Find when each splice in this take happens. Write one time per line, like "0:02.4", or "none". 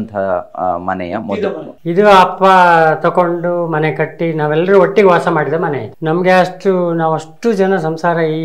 0:01.7
0:05.9